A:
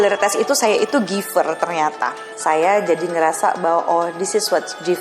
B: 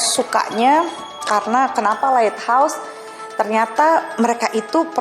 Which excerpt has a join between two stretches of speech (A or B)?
A